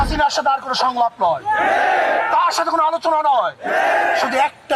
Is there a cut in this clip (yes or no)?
no